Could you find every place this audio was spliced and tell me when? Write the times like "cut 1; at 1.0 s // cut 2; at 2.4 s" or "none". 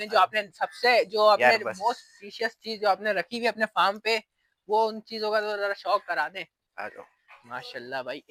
none

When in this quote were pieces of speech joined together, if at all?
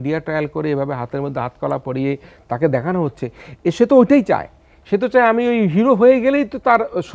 none

